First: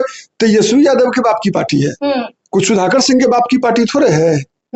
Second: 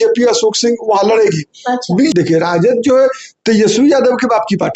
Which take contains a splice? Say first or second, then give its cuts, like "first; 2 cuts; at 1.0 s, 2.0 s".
second; 1 cut; at 2.1 s